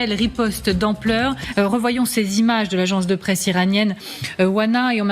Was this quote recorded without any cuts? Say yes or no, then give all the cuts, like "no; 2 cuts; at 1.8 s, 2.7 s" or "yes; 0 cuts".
no; 1 cut; at 1.5 s